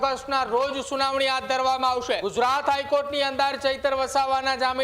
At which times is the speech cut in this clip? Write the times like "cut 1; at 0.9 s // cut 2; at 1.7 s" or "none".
cut 1; at 2.3 s